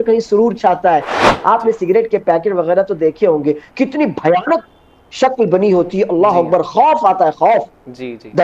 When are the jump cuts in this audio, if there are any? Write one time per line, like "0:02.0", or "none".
0:01.2